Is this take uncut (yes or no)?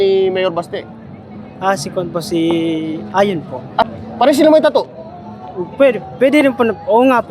no